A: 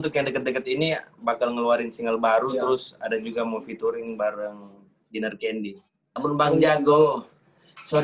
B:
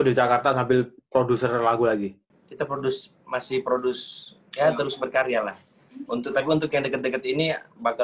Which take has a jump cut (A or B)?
A